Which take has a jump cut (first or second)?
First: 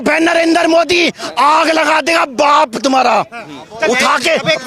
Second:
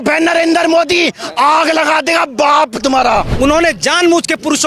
second